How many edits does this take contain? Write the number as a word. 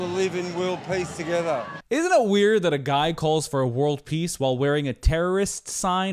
one